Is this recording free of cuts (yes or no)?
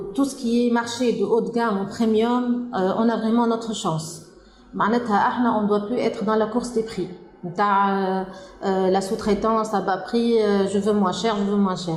yes